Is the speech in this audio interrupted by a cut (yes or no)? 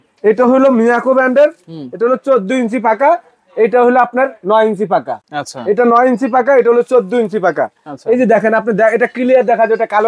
no